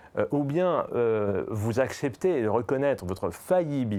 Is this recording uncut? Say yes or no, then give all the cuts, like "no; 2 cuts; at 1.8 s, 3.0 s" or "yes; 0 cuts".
yes; 0 cuts